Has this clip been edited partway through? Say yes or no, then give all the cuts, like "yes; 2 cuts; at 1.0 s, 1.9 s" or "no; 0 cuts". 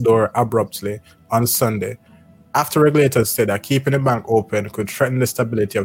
no; 0 cuts